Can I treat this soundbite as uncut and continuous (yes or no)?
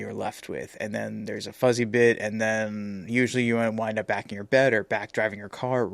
yes